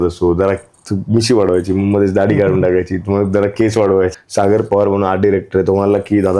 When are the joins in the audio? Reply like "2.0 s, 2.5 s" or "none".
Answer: 4.1 s